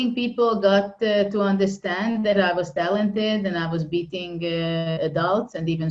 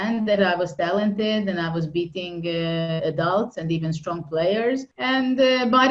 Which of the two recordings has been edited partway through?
second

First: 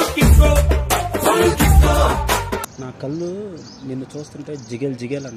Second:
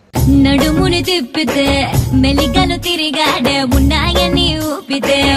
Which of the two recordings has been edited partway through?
first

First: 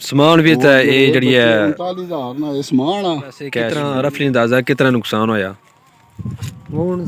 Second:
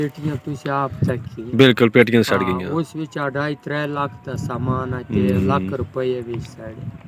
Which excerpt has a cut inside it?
first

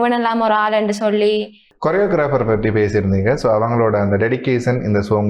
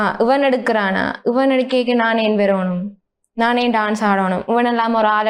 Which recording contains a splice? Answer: first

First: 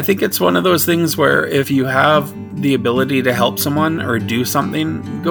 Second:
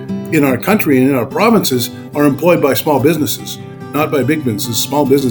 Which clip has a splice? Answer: first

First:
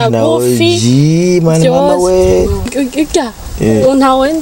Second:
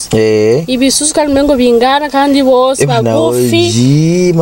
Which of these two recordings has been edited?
first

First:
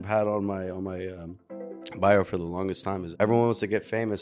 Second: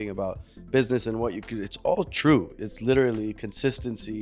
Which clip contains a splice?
first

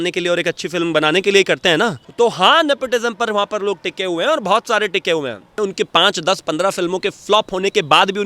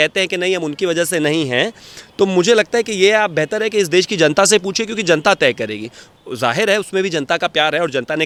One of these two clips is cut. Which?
first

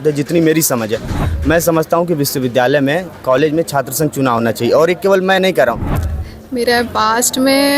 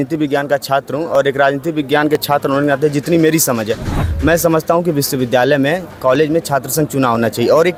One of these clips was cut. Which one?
first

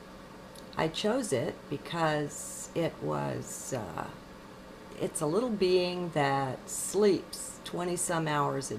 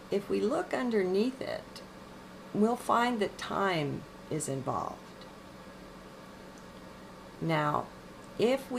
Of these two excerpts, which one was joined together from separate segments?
first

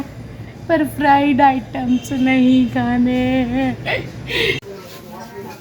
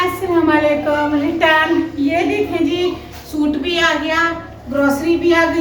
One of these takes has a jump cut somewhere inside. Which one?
first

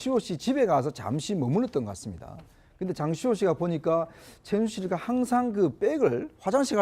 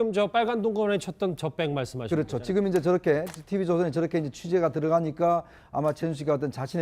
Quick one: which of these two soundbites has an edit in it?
first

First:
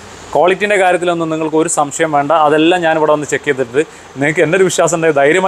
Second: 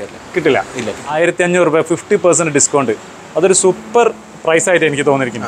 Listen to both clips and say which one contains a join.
second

